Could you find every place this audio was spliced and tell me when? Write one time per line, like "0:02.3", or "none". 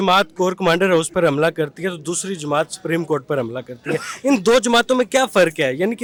none